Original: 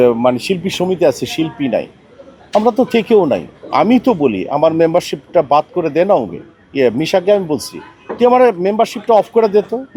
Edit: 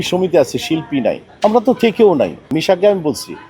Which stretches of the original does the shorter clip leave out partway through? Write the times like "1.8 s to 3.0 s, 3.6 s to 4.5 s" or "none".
1.9 s to 2.4 s, 3.6 s to 7.0 s